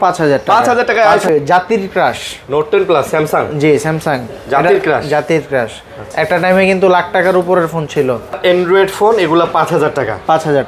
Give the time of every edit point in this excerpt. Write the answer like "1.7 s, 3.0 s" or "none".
1.3 s, 8.3 s